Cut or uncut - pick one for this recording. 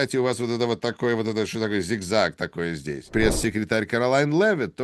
cut